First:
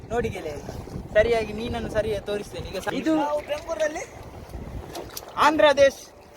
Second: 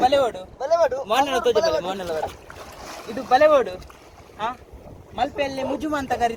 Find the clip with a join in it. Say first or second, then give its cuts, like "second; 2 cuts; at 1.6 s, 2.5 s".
first; 1 cut; at 2.9 s